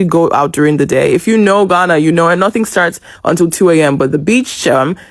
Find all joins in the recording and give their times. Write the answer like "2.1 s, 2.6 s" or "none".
none